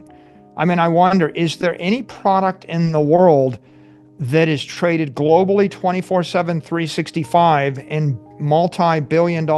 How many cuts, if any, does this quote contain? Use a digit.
0